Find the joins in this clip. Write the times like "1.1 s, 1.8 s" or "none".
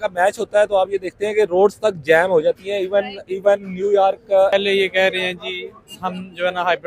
4.5 s